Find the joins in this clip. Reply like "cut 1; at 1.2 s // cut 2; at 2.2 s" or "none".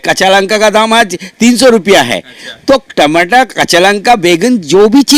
none